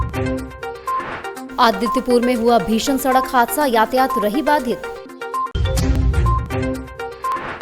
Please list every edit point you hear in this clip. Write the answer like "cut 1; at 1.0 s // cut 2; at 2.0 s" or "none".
cut 1; at 1.3 s